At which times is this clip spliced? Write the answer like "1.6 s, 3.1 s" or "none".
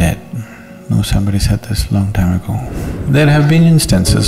2.7 s